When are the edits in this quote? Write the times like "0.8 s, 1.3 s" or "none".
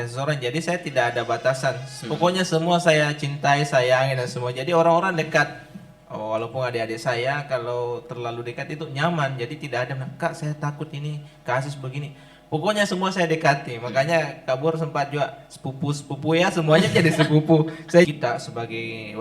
18.1 s